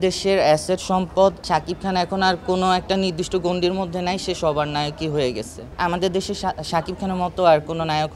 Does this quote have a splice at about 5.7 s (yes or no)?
yes